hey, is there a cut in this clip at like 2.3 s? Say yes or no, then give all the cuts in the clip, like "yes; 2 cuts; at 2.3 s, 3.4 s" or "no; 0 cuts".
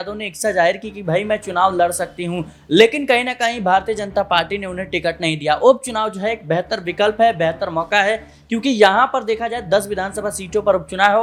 no; 0 cuts